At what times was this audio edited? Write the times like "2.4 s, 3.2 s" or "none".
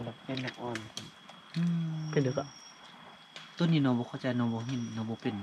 none